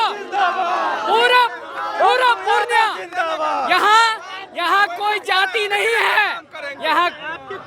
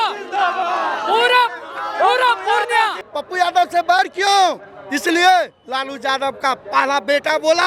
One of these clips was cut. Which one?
second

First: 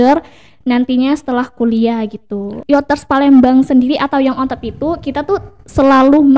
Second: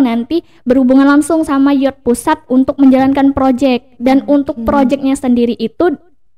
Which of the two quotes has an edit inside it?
first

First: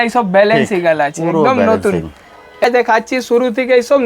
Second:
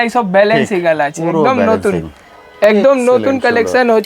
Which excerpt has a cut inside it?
first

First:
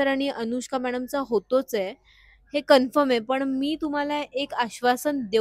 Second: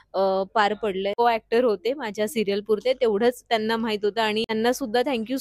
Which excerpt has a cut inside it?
second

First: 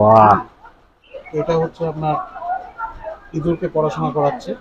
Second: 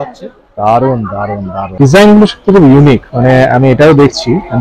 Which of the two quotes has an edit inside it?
second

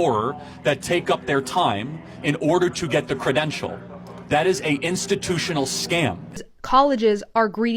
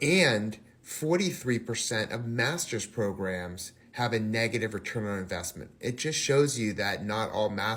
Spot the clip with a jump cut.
first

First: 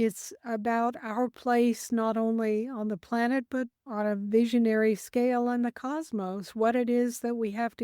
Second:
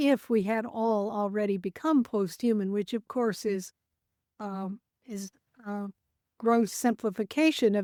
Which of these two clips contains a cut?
first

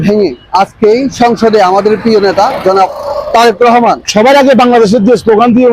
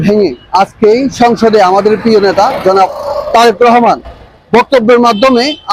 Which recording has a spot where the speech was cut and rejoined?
first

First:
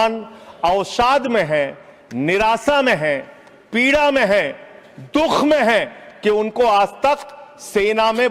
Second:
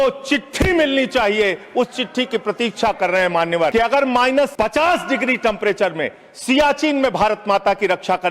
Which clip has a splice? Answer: second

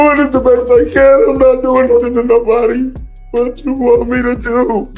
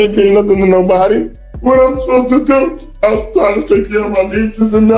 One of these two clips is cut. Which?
second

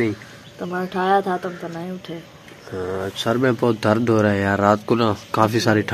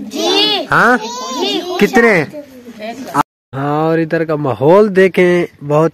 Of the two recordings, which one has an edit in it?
second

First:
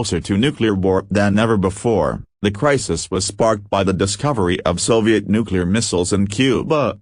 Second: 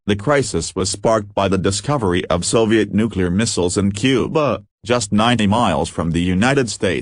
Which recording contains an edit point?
first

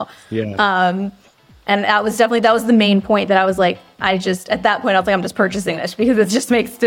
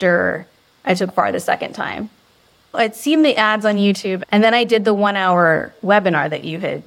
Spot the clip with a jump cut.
second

